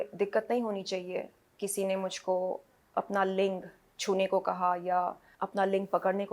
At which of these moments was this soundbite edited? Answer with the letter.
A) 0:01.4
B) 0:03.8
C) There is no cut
A